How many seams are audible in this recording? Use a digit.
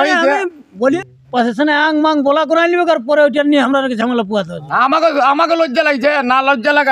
1